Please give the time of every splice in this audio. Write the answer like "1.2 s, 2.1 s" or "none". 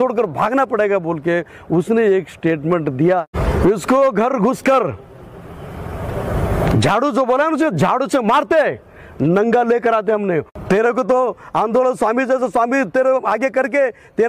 3.2 s, 10.5 s